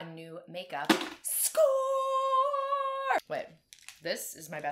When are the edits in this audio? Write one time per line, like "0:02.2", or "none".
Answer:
0:03.2